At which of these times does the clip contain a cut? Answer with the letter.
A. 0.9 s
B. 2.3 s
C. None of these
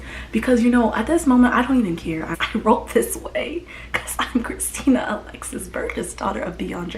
B